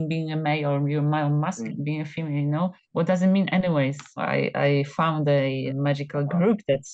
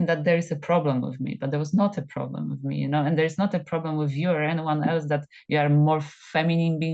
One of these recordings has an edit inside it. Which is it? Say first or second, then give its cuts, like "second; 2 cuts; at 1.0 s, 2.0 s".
first; 4 cuts; at 1.7 s, 2.8 s, 4.2 s, 5.7 s